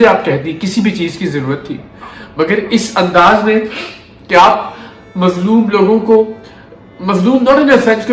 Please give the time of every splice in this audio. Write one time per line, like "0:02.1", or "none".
none